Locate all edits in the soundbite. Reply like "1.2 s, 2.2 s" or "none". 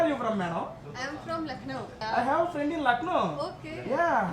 2.0 s